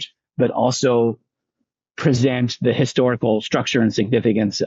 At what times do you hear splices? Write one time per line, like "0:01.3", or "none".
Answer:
none

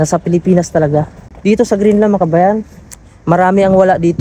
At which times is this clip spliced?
0:01.2

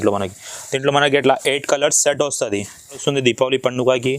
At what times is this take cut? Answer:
0:03.0

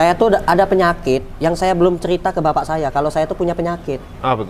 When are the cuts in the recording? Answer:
none

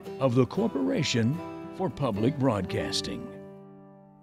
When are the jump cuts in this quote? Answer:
0:02.8

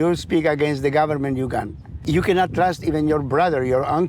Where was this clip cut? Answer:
0:01.9

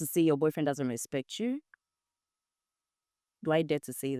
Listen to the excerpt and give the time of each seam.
none

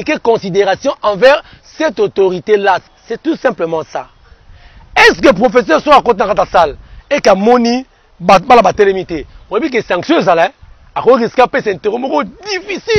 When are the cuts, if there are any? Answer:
0:02.9

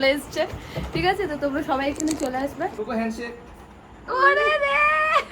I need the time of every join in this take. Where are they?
0:02.7

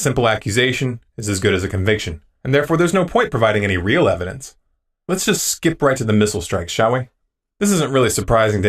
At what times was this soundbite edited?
0:04.5

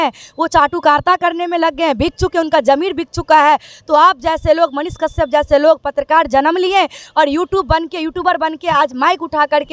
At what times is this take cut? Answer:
none

